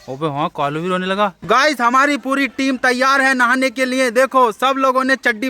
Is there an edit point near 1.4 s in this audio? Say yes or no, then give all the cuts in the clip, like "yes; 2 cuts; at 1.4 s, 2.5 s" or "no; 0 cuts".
yes; 1 cut; at 1.4 s